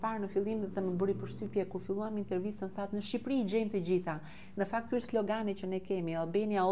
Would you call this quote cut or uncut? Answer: uncut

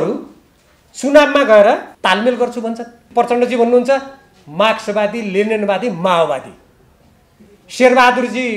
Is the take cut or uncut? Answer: cut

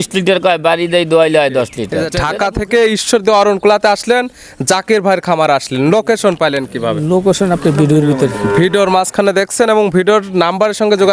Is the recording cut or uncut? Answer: cut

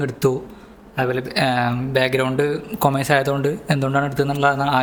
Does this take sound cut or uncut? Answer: uncut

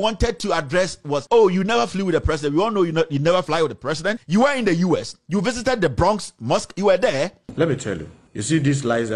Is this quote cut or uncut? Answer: cut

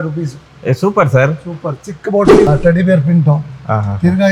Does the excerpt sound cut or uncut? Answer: cut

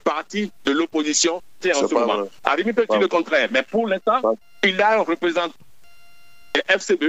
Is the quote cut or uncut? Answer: uncut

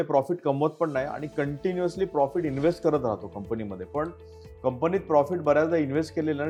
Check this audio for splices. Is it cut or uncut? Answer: uncut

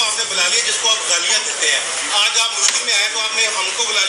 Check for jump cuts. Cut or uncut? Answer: uncut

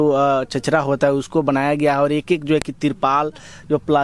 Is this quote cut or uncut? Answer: uncut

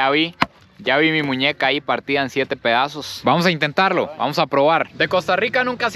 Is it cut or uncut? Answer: uncut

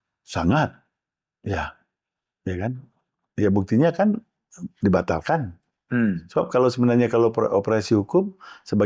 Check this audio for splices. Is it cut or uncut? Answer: uncut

